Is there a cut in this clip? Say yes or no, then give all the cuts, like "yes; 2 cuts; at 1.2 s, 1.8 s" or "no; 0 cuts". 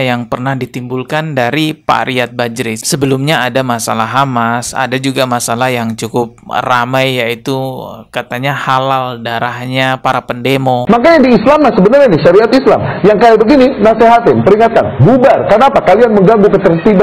no; 0 cuts